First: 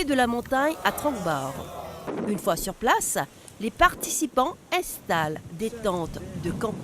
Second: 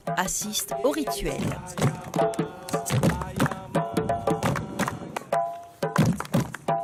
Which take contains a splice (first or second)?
first